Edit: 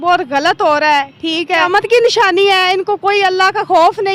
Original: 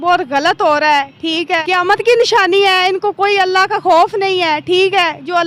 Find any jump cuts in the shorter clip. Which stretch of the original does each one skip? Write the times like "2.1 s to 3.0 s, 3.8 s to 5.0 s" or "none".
1.6 s to 1.8 s